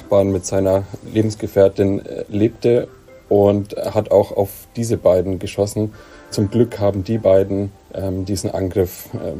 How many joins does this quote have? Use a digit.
2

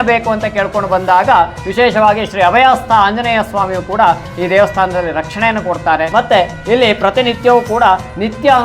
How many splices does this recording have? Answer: 1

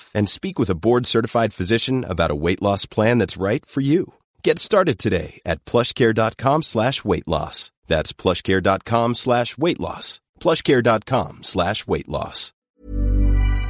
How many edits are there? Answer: 1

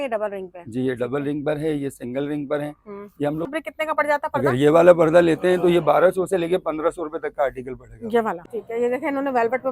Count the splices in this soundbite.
2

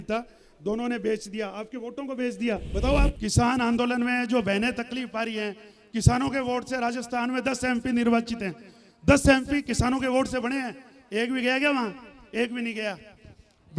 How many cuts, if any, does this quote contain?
1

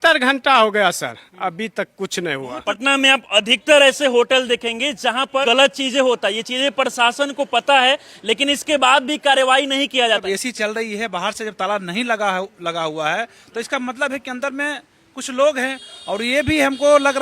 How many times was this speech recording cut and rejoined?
3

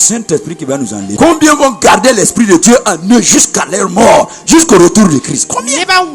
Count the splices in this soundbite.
1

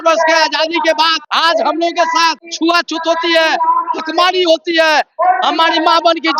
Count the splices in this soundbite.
2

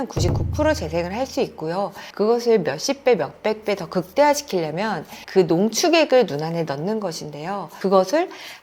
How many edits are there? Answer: 2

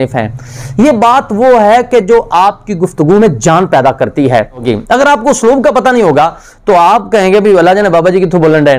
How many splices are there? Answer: 1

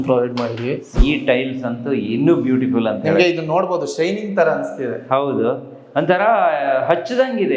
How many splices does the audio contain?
1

